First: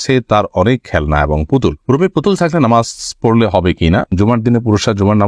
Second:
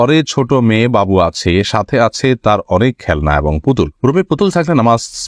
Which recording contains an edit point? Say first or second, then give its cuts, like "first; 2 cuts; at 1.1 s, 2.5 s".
first; 1 cut; at 4.1 s